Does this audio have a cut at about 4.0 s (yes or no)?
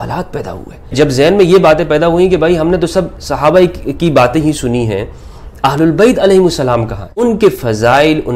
no